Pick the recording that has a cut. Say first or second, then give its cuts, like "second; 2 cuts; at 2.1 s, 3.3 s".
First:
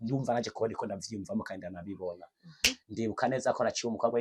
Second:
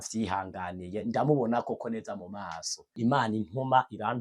second; 1 cut; at 2.8 s